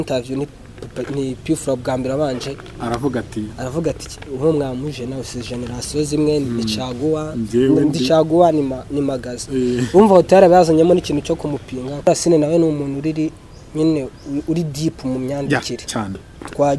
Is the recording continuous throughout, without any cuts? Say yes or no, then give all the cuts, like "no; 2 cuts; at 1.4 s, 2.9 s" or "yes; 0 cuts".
no; 1 cut; at 12.1 s